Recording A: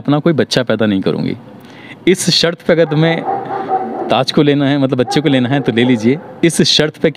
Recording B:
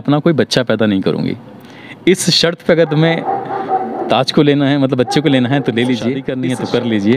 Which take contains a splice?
B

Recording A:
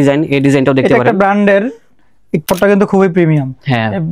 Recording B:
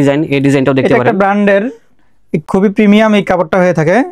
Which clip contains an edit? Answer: A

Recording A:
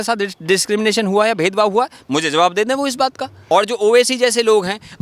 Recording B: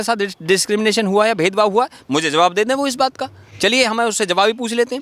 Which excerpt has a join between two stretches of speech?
A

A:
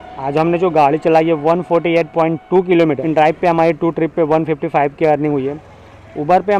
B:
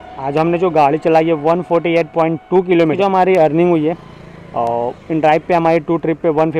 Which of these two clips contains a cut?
A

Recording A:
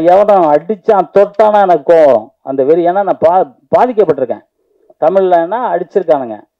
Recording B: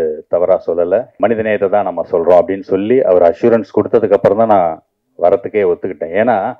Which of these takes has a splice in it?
B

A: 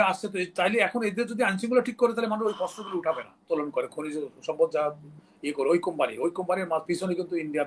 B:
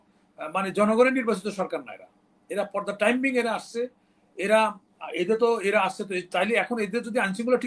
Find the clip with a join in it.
A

